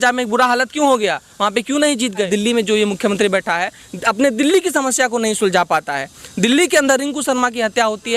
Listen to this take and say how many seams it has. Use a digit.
1